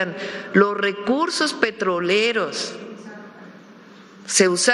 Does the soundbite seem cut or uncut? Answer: uncut